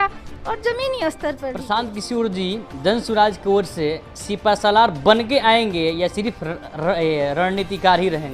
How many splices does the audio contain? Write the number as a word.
one